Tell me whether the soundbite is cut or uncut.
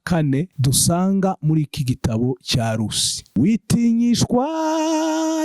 cut